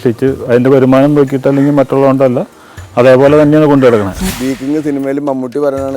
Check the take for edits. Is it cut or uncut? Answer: cut